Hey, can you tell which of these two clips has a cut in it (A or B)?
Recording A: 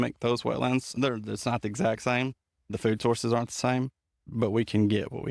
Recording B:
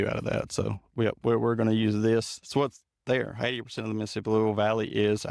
A